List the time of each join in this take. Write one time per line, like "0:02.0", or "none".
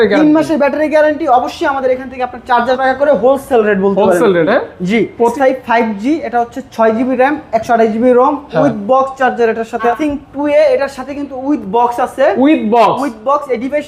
0:02.8
0:05.3
0:10.0